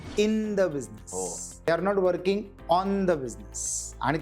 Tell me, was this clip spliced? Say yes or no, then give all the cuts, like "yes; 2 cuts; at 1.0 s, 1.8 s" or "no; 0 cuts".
yes; 1 cut; at 1.7 s